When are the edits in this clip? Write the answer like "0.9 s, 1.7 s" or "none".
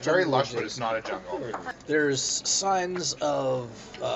1.7 s